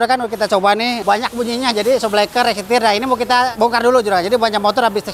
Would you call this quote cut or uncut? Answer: cut